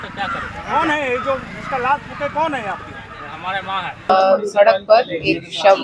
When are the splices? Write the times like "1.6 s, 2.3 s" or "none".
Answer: 4.1 s